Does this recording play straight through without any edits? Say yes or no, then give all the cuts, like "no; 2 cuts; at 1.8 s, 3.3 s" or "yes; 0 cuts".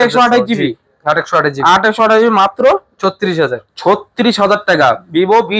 yes; 0 cuts